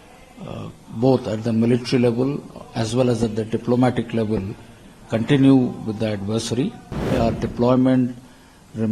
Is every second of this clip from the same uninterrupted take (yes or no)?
no